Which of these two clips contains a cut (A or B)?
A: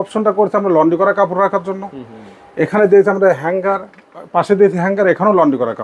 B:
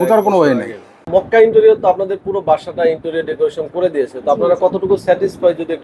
B